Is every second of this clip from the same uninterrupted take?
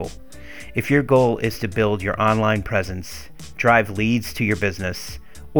yes; 0 cuts

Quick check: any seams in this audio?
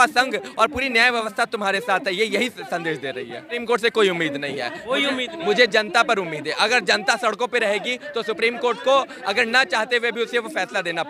yes; 1 cut; at 3.6 s

